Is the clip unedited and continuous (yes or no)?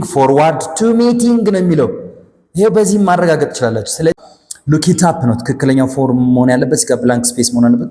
no